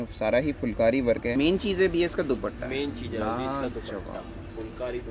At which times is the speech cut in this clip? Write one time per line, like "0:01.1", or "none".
0:01.3